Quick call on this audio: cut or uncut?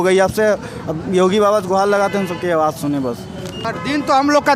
cut